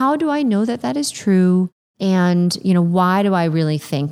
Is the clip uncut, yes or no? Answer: no